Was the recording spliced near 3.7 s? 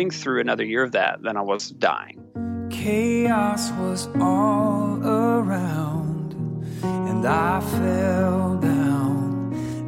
no; 1 cut; at 2.4 s

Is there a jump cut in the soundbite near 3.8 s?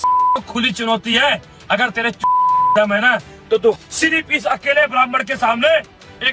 yes; 1 cut; at 3.8 s

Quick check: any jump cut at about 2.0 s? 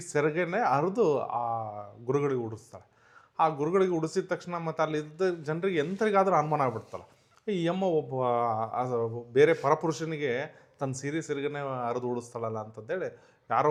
no; 0 cuts

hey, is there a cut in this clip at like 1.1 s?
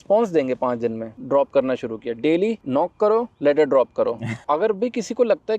yes; 2 cuts; at 1.1 s, 4.3 s

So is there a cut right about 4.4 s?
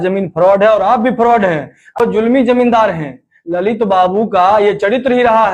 no; 1 cut; at 2.0 s

